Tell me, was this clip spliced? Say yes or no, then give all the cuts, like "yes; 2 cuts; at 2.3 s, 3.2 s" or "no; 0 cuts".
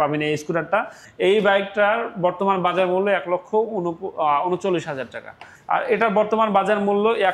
yes; 2 cuts; at 1.0 s, 5.5 s